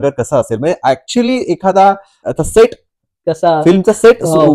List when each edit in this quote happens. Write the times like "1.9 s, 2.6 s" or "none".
2.1 s